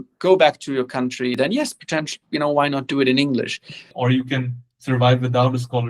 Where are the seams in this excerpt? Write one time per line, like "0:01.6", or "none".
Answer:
0:01.3
0:03.9